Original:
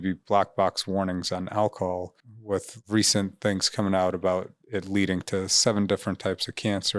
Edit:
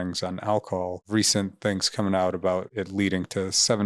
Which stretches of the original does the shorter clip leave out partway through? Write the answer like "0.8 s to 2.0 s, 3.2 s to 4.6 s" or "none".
2.1 s to 2.8 s, 4.5 s to 4.7 s